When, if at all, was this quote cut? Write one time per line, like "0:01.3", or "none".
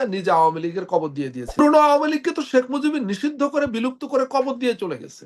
0:01.6

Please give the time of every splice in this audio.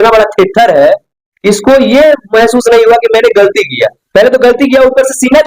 0:04.0

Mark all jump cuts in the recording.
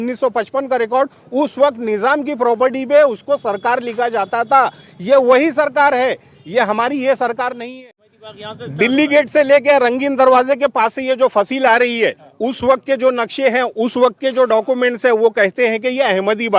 0:07.6

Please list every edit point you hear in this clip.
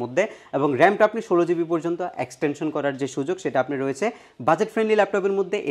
none

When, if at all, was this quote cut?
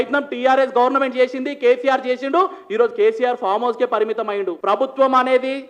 0:04.6

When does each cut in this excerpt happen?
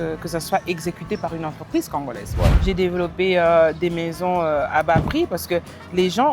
0:02.6

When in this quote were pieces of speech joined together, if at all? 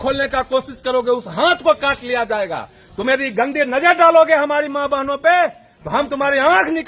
none

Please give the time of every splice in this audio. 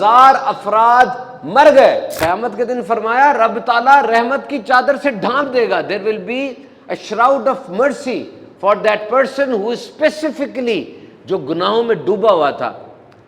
0:02.1

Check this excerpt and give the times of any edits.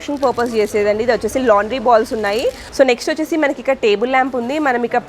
0:02.6

